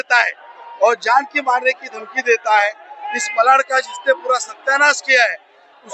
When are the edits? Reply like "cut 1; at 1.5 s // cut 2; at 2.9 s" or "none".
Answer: none